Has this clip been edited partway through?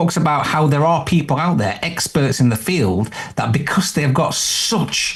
no; 0 cuts

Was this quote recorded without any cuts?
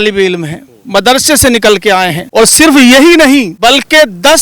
no; 2 cuts; at 2.2 s, 3.5 s

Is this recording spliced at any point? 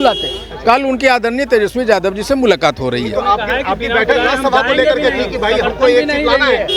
no; 0 cuts

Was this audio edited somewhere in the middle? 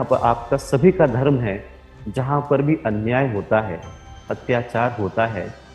no; 0 cuts

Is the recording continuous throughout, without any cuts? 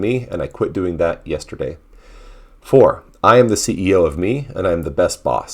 yes; 0 cuts

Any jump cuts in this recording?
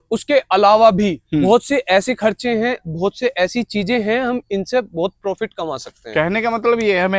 no; 0 cuts

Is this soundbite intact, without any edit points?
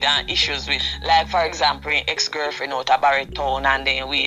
yes; 0 cuts

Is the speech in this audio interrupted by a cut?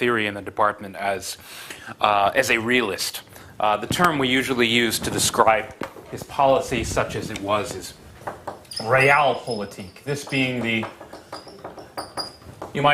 yes; 1 cut; at 5.3 s

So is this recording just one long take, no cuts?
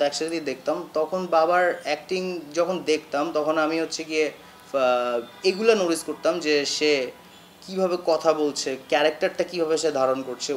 yes; 0 cuts

